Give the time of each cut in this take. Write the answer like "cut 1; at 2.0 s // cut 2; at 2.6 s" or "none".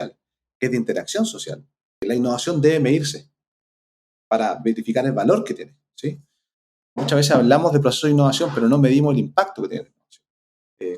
cut 1; at 2.0 s